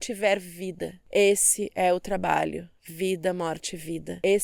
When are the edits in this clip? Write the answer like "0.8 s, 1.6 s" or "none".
none